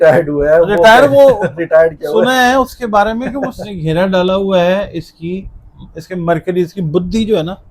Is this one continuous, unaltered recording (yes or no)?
no